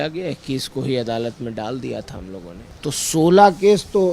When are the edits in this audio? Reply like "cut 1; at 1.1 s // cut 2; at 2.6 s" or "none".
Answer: cut 1; at 2.6 s